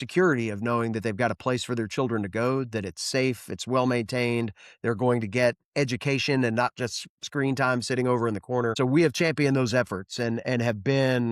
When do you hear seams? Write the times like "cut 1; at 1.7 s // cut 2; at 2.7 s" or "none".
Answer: cut 1; at 8.7 s